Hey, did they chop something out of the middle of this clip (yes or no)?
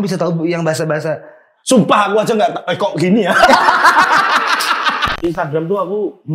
yes